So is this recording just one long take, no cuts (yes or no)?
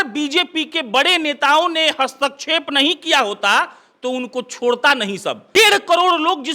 no